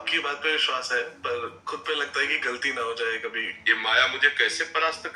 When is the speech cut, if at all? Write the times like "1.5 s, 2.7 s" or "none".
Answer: 3.4 s